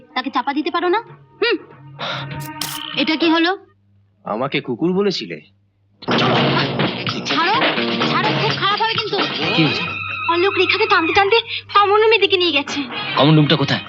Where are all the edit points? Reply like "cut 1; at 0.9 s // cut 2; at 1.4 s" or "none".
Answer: cut 1; at 2.8 s // cut 2; at 9.5 s